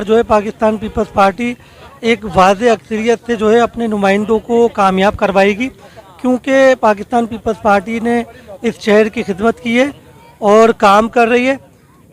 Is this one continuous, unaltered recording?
yes; 0 cuts

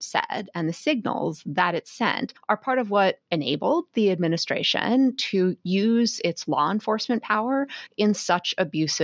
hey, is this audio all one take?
yes; 0 cuts

